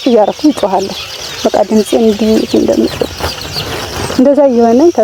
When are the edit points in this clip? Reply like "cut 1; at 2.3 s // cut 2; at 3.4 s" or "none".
none